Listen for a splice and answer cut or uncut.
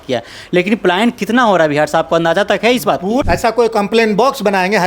cut